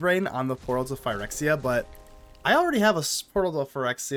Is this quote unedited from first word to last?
yes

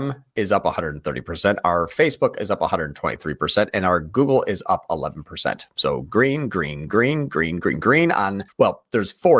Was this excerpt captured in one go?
no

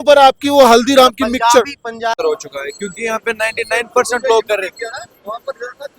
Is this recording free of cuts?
no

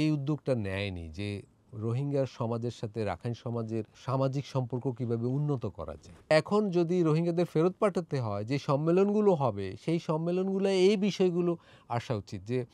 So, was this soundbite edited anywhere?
yes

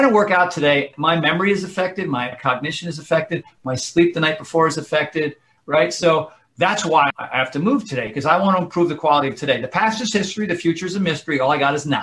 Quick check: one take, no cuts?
no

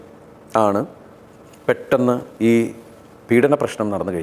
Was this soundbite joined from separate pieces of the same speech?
no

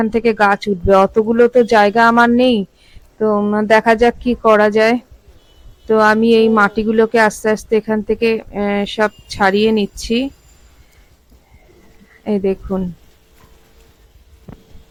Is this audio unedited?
yes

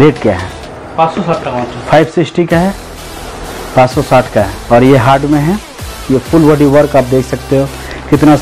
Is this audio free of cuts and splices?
no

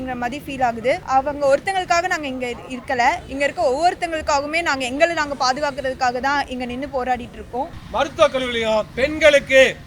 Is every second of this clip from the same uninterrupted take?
no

